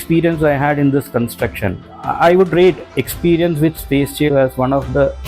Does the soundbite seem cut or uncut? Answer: cut